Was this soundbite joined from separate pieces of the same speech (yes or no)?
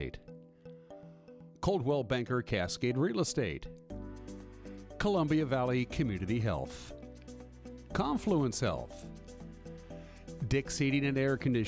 no